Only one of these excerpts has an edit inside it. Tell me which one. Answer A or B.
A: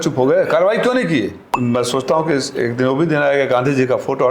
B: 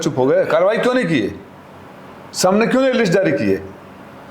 A